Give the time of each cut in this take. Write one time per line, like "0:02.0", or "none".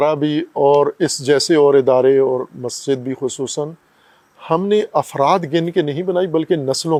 none